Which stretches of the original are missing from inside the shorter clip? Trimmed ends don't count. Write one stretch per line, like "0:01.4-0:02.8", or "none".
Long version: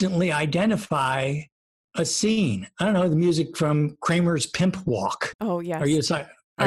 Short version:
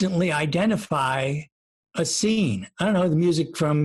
none